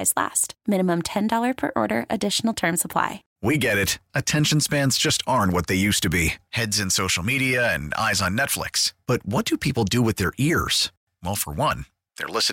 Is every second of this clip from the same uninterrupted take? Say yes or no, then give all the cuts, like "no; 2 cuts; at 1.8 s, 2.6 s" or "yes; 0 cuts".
no; 1 cut; at 3.3 s